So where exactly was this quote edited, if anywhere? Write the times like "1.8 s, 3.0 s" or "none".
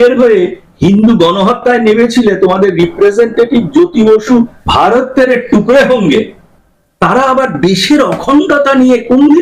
4.6 s